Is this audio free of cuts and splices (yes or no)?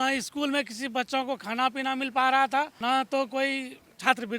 no